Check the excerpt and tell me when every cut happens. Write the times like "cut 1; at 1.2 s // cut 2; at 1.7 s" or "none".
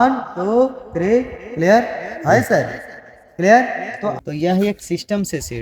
cut 1; at 4.1 s